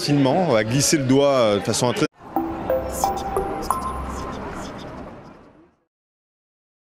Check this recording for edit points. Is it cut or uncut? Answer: uncut